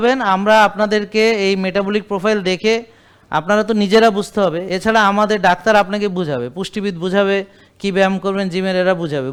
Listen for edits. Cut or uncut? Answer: uncut